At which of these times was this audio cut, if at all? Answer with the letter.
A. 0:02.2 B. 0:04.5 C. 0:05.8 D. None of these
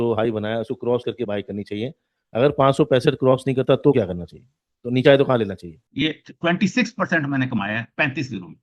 C